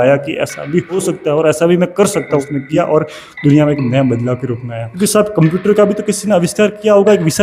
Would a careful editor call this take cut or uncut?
cut